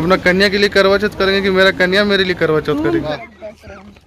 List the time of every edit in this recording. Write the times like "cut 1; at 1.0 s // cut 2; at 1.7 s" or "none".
cut 1; at 3.1 s